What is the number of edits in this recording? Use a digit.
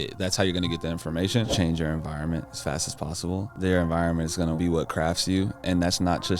3